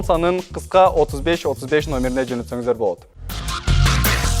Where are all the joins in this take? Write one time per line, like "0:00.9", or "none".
0:03.1